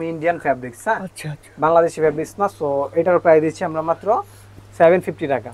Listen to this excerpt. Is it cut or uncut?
uncut